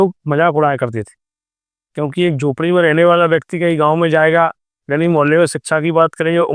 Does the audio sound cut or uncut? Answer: uncut